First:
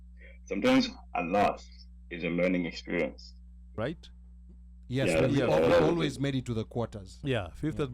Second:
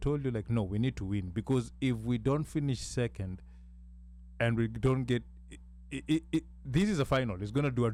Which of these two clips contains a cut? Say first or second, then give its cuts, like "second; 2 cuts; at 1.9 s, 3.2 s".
first; 1 cut; at 3.7 s